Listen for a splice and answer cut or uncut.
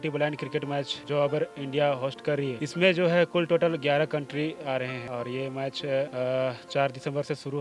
cut